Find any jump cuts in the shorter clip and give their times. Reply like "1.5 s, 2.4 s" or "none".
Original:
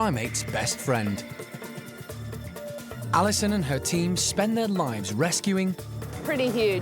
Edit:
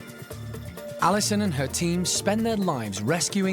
1.0 s